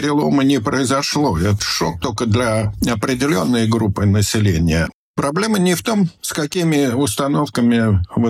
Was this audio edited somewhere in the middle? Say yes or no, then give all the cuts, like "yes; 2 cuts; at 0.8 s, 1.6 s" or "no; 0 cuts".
yes; 2 cuts; at 1.6 s, 5.0 s